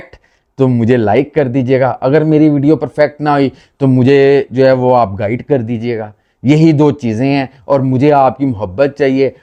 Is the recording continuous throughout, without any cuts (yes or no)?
yes